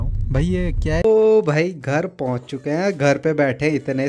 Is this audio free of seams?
no; 1 cut; at 1.0 s

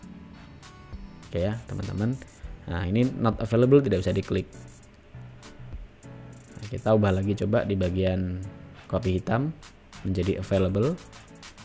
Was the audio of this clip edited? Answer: no; 0 cuts

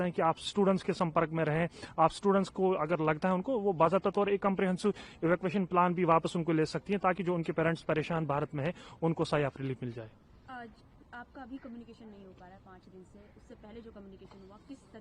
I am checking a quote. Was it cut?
no; 0 cuts

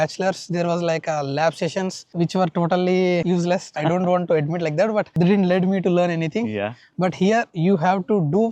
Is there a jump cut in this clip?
no; 0 cuts

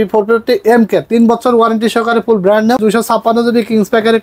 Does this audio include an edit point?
yes; 1 cut; at 2.8 s

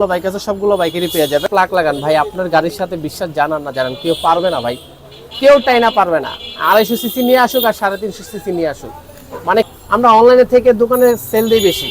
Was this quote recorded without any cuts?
no; 2 cuts; at 1.5 s, 9.7 s

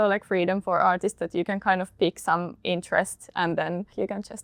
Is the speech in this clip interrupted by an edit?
no; 0 cuts

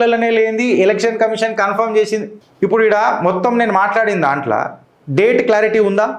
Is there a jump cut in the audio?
yes; 1 cut; at 2.4 s

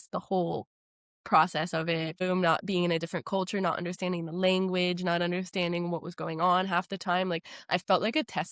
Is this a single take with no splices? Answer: no; 1 cut; at 2.2 s

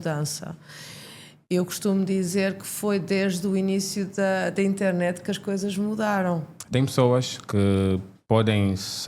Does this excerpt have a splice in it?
yes; 1 cut; at 6.5 s

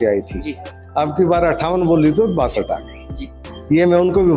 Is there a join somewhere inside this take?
no; 0 cuts

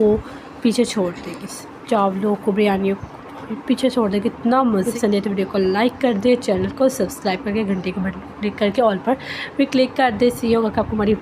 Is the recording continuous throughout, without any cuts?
no; 1 cut; at 4.9 s

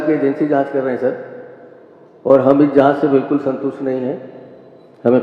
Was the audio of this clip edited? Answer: no; 0 cuts

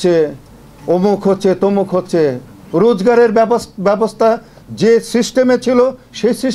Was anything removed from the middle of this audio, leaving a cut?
no; 0 cuts

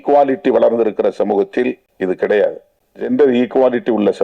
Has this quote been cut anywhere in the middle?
yes; 2 cuts; at 1.9 s, 3.1 s

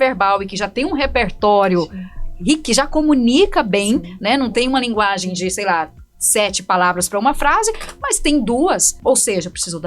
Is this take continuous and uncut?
no; 1 cut; at 8.9 s

